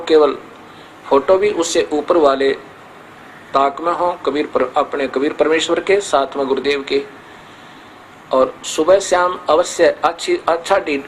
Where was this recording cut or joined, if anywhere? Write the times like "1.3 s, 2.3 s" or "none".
none